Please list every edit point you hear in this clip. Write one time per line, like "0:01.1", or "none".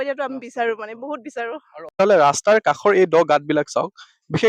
0:02.0